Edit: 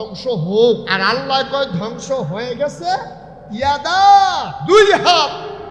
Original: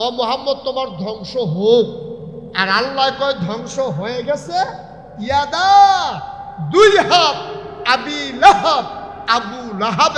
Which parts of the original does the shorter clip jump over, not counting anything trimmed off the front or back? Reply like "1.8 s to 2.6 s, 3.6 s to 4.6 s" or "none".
2.0 s to 2.6 s, 6.2 s to 6.5 s